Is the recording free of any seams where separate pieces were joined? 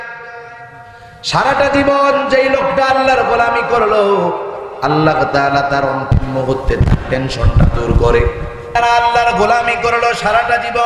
no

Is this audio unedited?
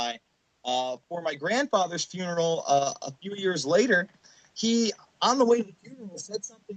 yes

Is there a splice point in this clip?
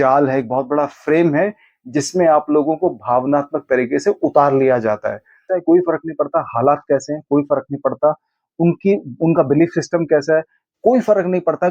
yes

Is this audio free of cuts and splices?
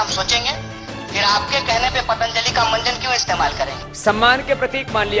no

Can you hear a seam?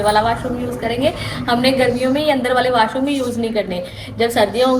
no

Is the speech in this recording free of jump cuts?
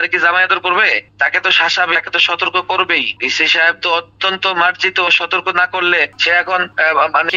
yes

